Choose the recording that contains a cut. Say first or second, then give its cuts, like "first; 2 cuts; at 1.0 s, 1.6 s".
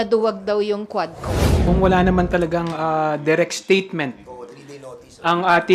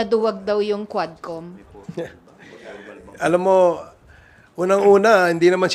first; 1 cut; at 1.5 s